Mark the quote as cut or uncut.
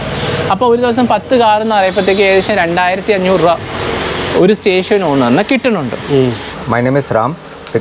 cut